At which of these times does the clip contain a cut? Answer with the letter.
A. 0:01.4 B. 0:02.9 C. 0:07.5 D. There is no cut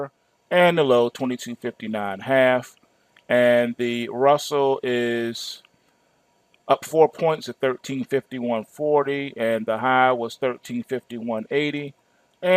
C